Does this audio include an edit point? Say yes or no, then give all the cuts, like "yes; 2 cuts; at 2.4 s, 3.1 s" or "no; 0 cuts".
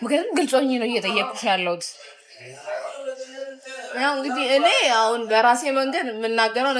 no; 0 cuts